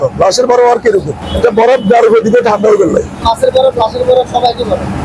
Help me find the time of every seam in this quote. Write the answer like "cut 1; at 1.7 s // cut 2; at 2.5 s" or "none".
cut 1; at 1.2 s // cut 2; at 3.2 s